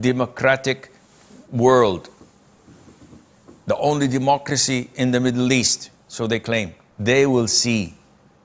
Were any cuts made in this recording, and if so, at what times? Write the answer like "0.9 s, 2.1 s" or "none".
6.8 s

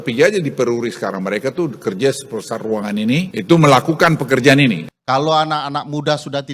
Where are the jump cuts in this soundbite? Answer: 4.9 s

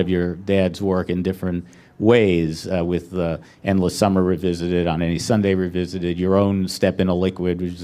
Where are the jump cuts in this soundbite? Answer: 1.0 s

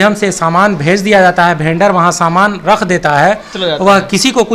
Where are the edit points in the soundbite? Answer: none

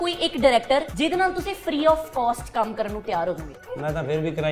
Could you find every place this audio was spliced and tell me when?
0.9 s, 3.5 s

